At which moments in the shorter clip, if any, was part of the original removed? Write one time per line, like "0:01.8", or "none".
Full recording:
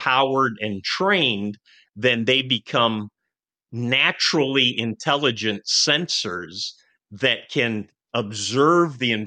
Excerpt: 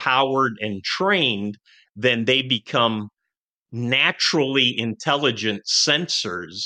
none